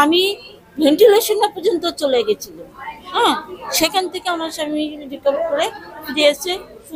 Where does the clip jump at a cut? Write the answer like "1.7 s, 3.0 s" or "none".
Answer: none